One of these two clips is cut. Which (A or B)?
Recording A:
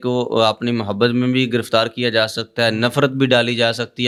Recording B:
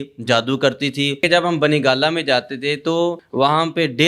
B